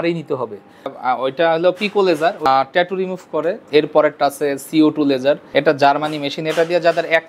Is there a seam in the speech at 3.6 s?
yes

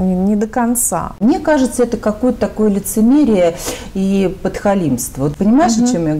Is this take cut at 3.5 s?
no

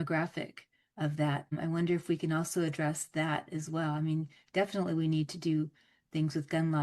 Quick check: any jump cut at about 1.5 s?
yes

